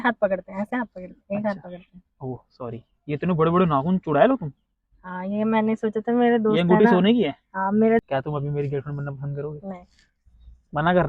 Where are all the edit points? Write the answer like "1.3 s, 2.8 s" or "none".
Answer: 8.0 s